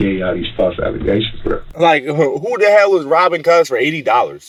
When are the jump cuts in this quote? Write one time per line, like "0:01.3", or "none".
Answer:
none